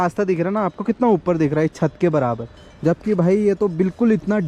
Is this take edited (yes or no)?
no